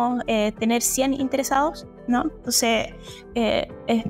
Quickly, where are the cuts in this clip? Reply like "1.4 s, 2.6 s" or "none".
none